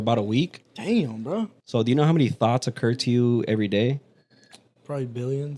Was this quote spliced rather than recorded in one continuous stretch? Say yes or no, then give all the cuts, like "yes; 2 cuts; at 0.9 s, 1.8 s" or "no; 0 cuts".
yes; 1 cut; at 1.6 s